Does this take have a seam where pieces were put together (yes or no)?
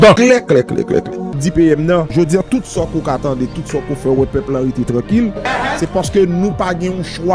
yes